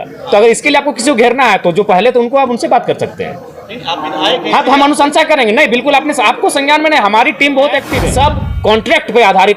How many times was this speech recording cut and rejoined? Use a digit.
1